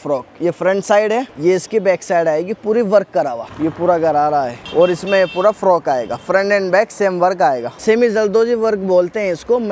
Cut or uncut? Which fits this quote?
cut